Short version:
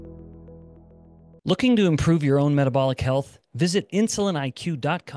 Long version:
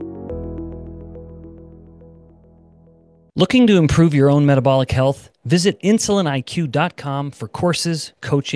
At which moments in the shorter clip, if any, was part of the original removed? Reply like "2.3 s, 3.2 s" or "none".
1.3 s